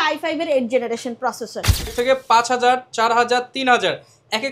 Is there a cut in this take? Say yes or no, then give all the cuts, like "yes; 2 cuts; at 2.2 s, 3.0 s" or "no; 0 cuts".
yes; 1 cut; at 1.9 s